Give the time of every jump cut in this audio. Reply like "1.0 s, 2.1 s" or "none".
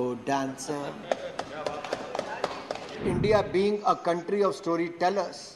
3.0 s